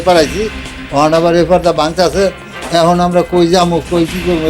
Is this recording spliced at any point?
no; 0 cuts

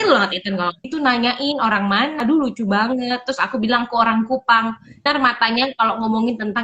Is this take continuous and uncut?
no; 3 cuts; at 0.9 s, 2.2 s, 5.1 s

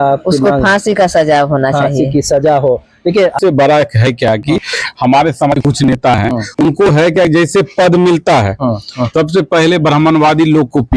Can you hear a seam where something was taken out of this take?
yes; 1 cut; at 3.4 s

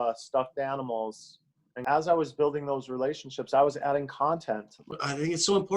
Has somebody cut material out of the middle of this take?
yes; 2 cuts; at 1.7 s, 4.8 s

